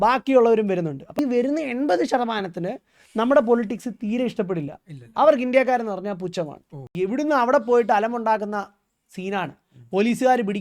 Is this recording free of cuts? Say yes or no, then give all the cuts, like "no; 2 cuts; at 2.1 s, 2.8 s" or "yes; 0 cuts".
no; 2 cuts; at 1.2 s, 6.8 s